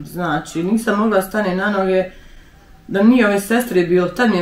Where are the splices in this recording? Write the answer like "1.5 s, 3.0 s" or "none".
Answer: none